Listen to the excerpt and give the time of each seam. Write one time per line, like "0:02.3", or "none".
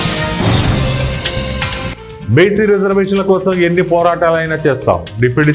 0:02.1